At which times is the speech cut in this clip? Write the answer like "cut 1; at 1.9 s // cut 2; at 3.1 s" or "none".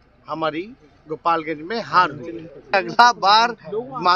cut 1; at 2.7 s